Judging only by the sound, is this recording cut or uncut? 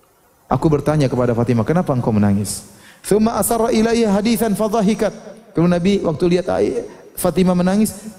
uncut